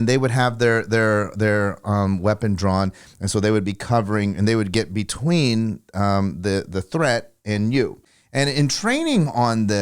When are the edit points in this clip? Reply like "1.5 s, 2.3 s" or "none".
8.0 s